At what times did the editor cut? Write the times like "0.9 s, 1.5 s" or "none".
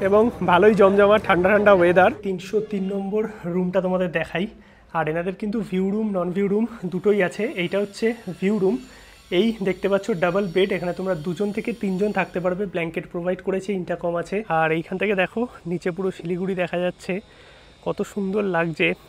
2.2 s, 14.4 s

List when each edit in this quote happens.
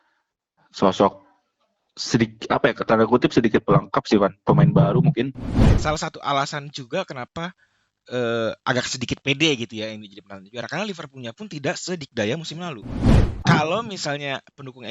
5.7 s, 13.3 s

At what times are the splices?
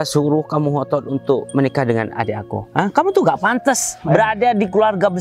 none

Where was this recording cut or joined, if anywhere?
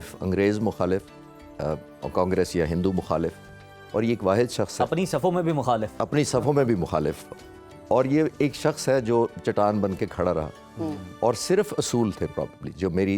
none

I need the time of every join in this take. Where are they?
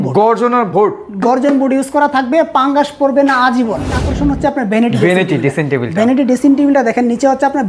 4.0 s

